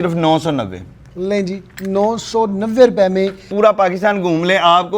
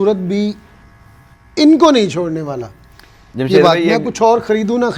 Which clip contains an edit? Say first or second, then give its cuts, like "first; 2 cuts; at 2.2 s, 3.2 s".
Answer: first; 1 cut; at 3.5 s